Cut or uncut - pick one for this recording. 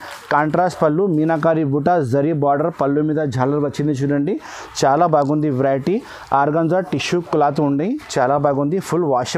uncut